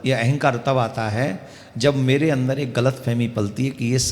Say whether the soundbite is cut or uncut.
uncut